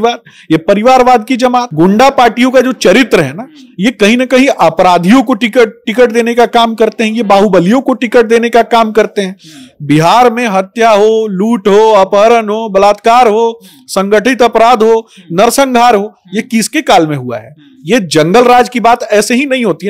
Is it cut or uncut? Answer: cut